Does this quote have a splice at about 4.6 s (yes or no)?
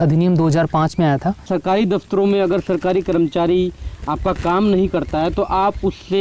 no